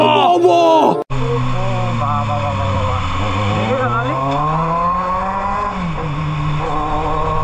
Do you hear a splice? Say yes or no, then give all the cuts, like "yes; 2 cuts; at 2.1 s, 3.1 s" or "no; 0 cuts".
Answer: no; 0 cuts